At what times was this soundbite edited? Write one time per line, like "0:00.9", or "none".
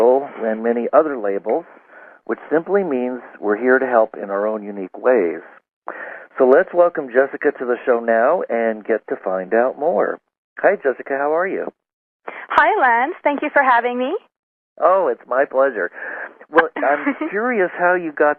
0:06.7